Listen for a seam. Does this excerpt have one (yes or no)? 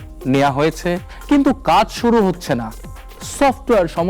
yes